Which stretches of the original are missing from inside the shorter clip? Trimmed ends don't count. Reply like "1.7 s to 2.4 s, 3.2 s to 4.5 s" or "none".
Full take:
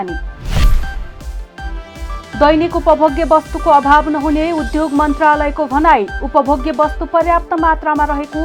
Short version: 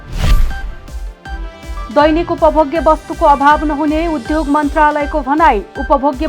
2.2 s to 2.3 s